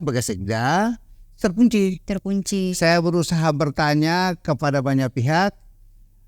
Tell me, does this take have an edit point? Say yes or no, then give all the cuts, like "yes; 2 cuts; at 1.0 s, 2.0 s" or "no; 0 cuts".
no; 0 cuts